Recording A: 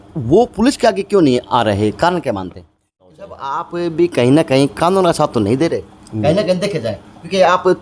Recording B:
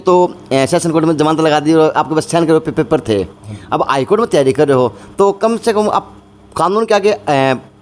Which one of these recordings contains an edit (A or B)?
A